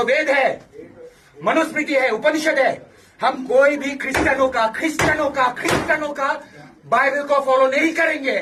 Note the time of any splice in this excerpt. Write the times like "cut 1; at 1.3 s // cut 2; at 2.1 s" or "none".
none